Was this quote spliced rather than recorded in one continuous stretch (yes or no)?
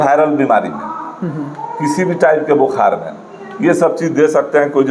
no